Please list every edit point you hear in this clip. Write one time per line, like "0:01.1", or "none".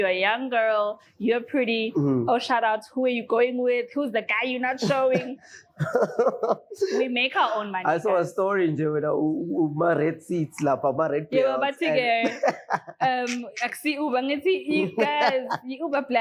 none